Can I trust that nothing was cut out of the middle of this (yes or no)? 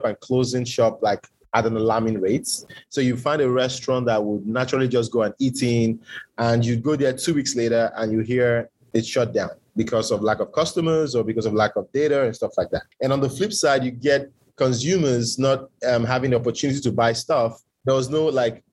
no